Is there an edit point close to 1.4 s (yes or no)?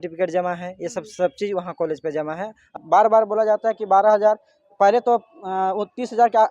no